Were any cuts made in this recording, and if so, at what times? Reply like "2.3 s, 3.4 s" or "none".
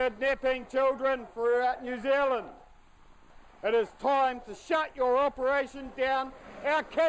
5.8 s